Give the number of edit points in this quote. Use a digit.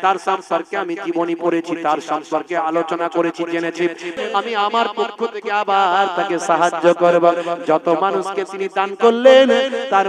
1